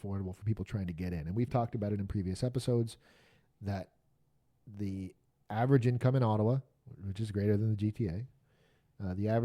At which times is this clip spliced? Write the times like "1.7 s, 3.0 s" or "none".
none